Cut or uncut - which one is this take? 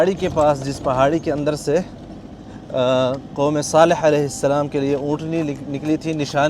uncut